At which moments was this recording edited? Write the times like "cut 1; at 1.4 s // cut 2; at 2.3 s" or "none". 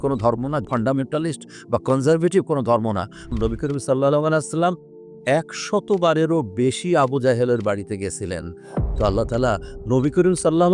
cut 1; at 3.3 s // cut 2; at 8.8 s